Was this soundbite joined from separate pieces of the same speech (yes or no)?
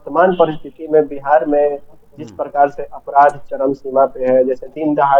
no